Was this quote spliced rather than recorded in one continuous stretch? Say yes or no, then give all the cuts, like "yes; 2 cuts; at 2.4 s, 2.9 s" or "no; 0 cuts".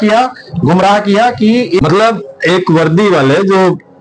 yes; 1 cut; at 1.8 s